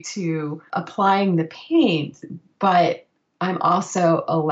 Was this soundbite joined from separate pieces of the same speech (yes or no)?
no